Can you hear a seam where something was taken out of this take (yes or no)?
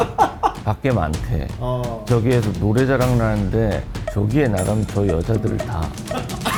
no